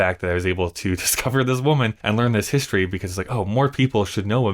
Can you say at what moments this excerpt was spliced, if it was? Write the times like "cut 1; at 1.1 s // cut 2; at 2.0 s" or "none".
none